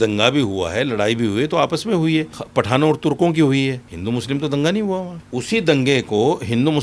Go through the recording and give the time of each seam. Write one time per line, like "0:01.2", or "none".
0:02.4
0:03.9
0:05.2